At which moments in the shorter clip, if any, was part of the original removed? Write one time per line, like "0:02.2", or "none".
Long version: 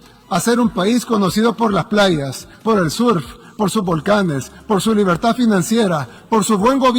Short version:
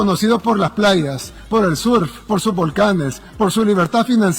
0:02.2